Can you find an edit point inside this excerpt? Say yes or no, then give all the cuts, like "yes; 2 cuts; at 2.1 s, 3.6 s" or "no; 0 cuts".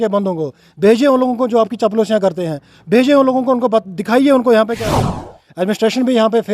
yes; 1 cut; at 4.9 s